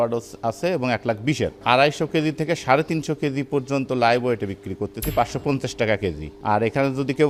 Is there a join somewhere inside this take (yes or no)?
yes